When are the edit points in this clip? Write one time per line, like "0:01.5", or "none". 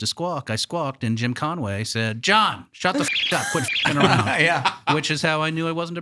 none